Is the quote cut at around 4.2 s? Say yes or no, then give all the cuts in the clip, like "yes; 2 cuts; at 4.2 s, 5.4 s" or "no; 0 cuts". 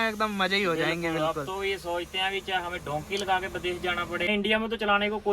yes; 1 cut; at 4.2 s